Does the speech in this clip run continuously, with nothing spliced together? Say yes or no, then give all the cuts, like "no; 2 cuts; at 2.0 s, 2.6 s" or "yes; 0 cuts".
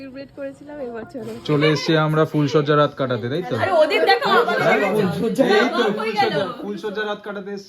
no; 1 cut; at 1.4 s